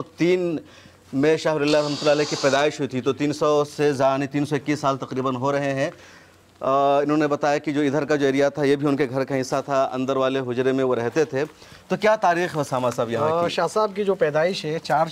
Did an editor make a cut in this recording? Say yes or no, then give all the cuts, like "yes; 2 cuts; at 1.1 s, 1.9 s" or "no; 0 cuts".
no; 0 cuts